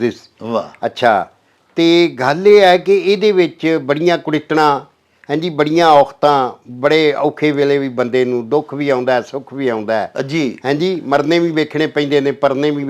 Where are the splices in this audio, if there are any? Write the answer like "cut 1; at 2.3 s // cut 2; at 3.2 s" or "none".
none